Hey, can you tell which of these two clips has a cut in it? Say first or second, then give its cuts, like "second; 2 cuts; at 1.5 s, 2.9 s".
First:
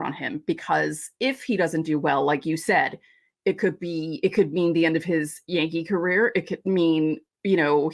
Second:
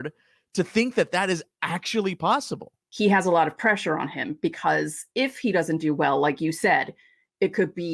second; 1 cut; at 2.8 s